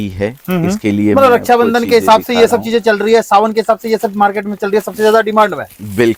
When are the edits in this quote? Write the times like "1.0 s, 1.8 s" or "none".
none